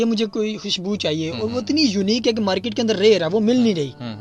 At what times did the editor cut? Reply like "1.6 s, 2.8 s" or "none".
none

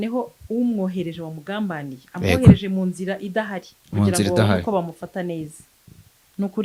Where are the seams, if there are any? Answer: none

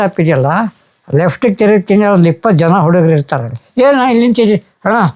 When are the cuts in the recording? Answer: 3.5 s

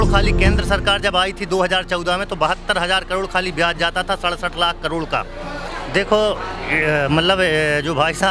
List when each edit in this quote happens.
5.6 s

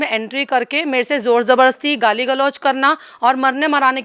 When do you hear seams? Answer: none

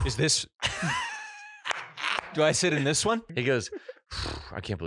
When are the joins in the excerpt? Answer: 3.2 s

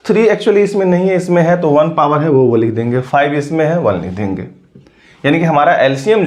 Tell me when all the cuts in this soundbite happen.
none

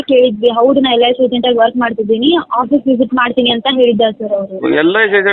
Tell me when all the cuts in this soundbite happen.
none

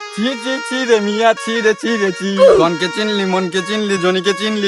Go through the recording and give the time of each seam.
none

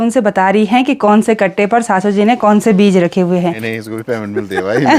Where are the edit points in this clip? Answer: 3.7 s

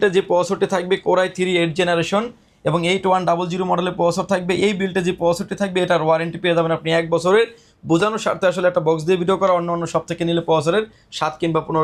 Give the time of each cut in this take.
none

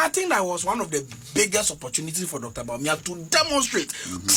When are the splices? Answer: none

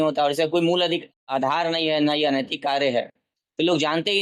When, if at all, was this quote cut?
none

